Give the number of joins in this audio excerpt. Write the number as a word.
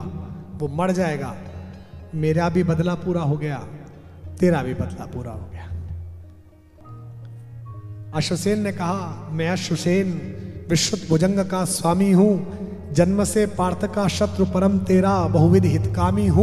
one